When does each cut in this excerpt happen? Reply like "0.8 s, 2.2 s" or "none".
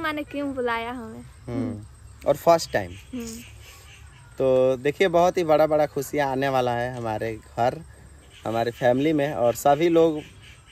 none